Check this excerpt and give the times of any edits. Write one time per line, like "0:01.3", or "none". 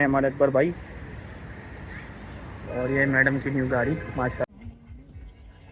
0:04.4